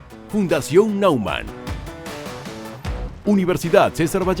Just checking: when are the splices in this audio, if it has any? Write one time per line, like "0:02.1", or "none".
0:03.2